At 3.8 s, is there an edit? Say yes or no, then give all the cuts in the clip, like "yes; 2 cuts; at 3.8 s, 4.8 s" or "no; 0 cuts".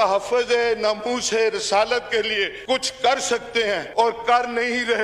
yes; 2 cuts; at 2.5 s, 3.8 s